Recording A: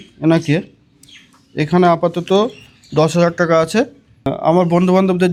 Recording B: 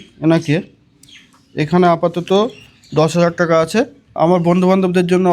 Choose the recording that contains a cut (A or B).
B